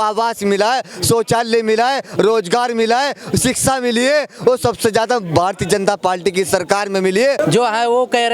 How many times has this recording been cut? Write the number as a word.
one